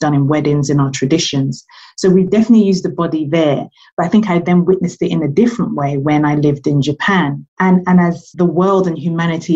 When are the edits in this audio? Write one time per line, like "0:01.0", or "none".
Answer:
0:07.4
0:08.2